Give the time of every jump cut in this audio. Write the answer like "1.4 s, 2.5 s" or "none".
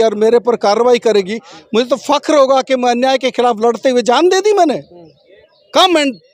none